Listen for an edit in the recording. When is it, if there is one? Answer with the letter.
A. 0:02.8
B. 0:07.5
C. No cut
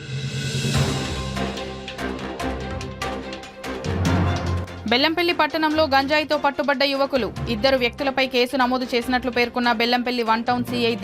C